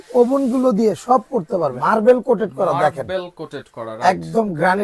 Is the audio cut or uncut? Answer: cut